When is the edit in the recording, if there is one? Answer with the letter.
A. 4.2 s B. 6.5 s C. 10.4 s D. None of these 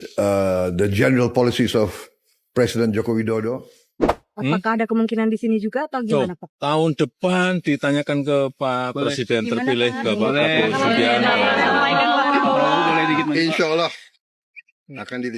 A